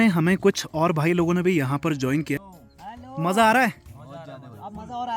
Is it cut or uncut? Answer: cut